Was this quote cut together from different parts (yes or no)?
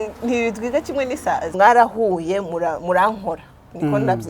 yes